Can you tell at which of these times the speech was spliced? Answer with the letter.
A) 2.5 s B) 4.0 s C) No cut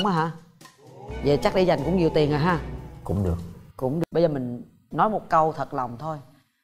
B